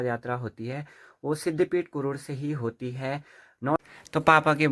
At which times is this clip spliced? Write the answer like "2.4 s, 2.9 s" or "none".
3.8 s